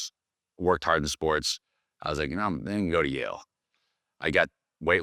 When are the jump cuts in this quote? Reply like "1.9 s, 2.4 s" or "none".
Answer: none